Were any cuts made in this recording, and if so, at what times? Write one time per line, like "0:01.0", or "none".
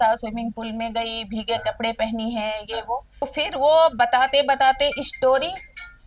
0:03.2